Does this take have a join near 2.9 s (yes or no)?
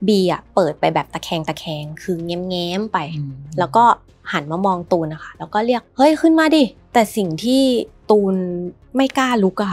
no